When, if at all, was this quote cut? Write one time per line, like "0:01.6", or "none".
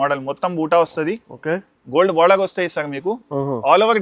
none